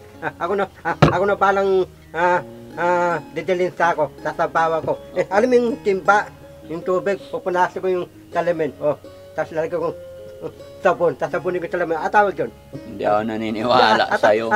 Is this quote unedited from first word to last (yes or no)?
yes